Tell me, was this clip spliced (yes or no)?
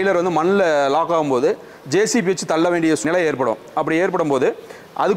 yes